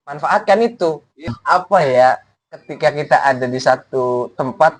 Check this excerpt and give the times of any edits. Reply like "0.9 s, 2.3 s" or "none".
1.4 s